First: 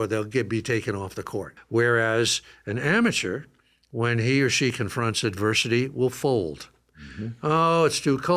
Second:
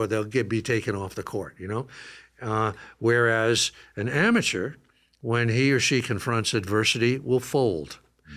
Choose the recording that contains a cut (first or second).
first